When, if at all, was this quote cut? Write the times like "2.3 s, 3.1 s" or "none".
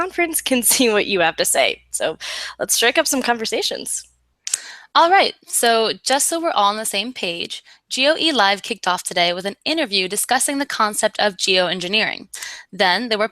6.5 s